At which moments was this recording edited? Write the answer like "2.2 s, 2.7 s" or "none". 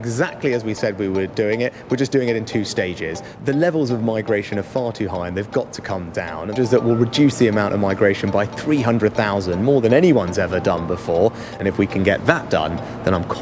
3.4 s, 6.5 s, 11.5 s